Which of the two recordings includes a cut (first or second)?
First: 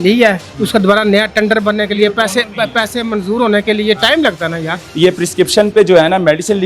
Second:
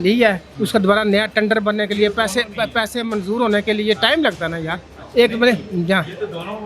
first